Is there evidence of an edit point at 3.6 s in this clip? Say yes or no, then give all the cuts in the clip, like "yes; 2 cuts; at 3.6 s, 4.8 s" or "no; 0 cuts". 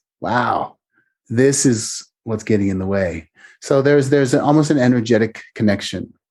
no; 0 cuts